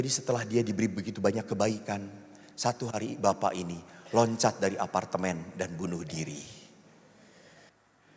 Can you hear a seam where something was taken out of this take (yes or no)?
no